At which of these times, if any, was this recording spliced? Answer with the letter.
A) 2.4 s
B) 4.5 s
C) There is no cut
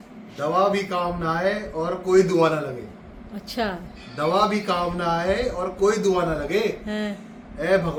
C